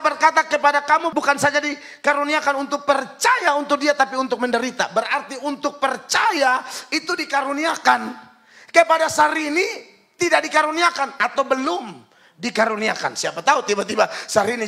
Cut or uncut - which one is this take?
cut